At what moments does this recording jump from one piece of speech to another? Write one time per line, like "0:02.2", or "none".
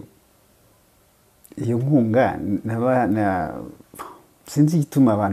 none

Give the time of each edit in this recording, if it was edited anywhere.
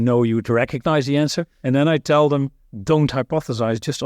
0:01.5

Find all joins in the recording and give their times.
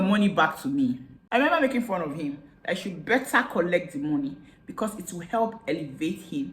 0:01.1

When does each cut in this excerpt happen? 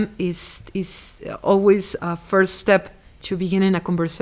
0:01.9

